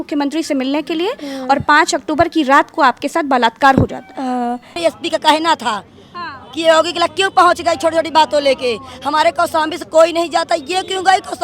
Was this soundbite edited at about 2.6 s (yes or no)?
no